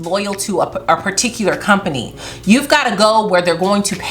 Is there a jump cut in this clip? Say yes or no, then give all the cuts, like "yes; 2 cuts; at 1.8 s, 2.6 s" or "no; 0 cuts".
no; 0 cuts